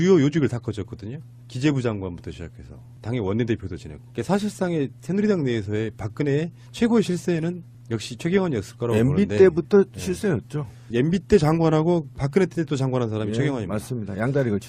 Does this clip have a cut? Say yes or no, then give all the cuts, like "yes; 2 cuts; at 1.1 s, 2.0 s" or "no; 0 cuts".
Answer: no; 0 cuts